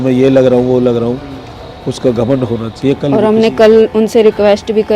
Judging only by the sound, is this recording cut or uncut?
cut